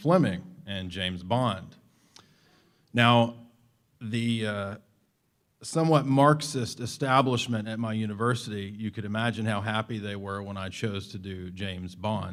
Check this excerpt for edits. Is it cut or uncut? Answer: uncut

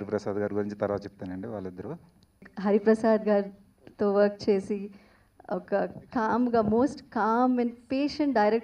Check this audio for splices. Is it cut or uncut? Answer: cut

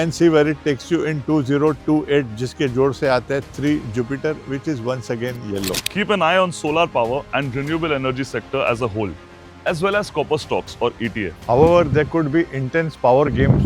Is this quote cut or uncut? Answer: cut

